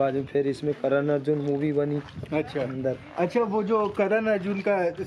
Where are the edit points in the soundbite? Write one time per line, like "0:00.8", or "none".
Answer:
none